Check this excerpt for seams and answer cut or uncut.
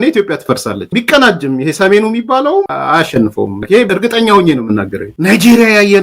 cut